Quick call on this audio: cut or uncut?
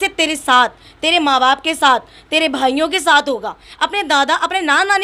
uncut